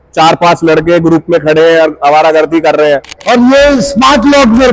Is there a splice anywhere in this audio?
yes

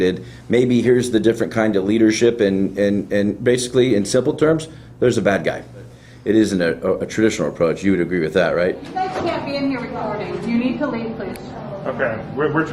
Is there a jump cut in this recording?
yes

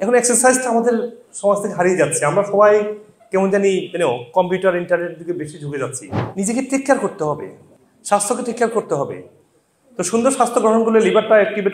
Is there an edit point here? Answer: yes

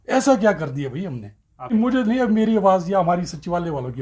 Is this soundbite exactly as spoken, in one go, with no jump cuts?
yes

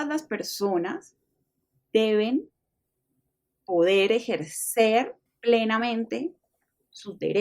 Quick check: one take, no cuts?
no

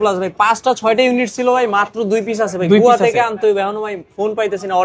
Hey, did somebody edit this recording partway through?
no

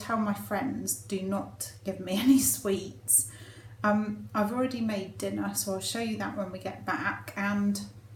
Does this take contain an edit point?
no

